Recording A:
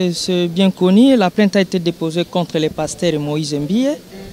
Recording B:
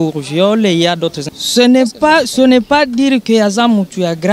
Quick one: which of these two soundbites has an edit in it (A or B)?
B